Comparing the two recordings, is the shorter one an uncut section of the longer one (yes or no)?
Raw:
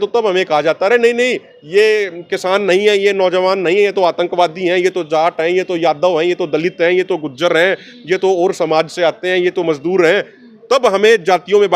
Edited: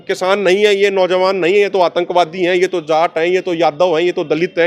yes